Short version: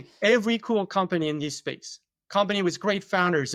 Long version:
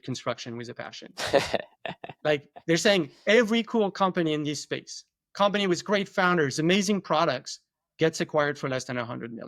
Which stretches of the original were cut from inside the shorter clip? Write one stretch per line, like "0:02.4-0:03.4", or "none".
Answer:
none